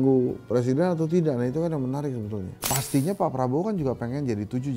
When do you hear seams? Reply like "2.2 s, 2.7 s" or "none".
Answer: 2.5 s